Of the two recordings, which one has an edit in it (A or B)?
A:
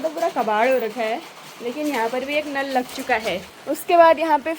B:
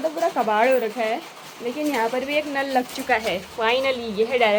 A